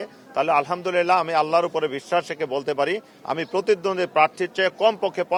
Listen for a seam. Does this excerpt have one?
no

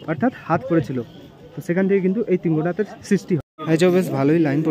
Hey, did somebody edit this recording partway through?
yes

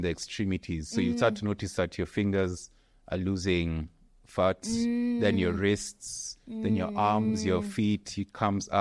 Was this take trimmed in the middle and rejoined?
no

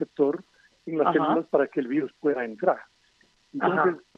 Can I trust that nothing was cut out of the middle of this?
yes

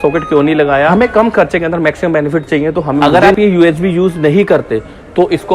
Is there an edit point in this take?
yes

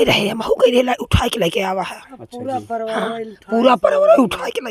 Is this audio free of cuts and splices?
yes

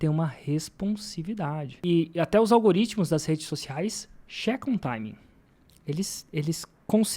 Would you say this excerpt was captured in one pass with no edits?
no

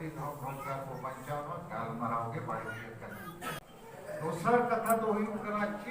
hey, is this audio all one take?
no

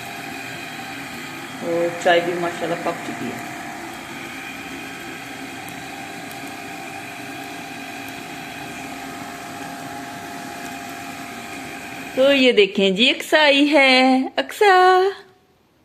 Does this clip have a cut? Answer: no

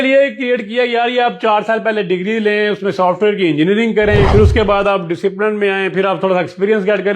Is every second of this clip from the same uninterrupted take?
no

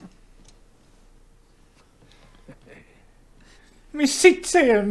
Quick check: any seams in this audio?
no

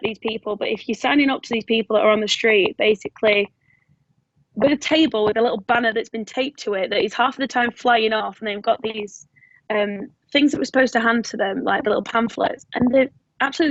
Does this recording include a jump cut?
no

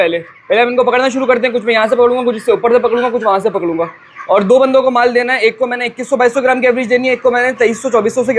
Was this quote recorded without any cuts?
yes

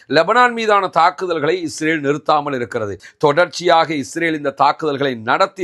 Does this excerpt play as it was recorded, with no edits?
no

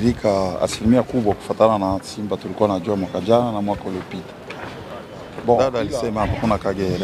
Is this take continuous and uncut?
no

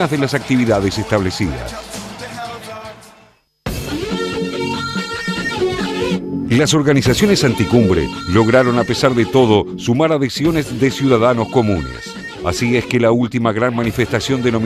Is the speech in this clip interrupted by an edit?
no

